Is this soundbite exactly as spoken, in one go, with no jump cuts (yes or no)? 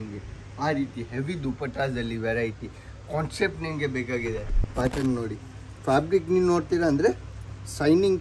no